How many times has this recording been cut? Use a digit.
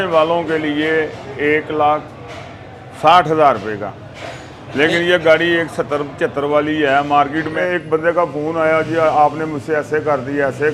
1